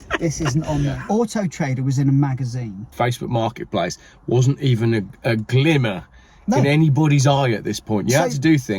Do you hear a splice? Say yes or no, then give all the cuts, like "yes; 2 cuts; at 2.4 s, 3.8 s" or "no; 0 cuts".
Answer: yes; 2 cuts; at 1.0 s, 2.9 s